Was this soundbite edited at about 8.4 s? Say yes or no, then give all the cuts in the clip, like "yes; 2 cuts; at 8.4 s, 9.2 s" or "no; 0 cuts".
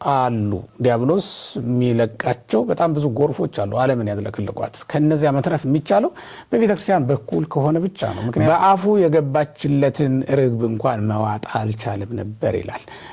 yes; 1 cut; at 8.4 s